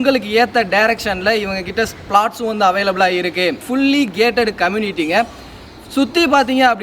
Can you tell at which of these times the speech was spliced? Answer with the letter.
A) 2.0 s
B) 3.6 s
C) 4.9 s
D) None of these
B